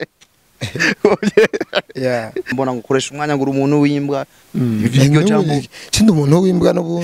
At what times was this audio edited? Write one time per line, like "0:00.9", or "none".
0:02.5